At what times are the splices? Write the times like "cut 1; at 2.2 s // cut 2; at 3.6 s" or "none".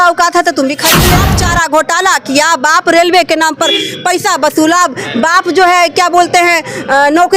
cut 1; at 1.1 s